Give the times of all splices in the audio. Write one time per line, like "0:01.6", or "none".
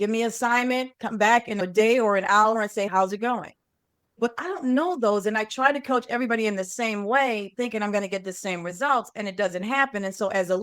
0:01.6